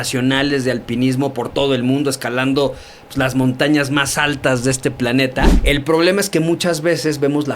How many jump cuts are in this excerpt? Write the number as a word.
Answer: one